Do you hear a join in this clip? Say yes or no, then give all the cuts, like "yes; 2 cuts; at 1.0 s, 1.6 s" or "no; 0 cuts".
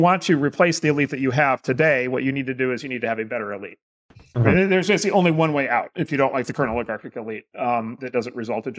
no; 0 cuts